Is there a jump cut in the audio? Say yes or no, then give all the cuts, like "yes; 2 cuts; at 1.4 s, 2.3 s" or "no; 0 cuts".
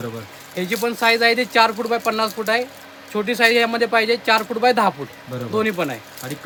no; 0 cuts